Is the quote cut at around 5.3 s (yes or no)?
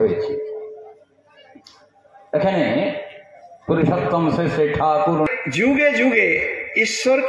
yes